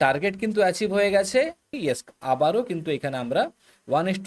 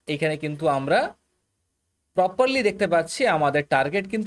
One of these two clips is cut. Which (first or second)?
first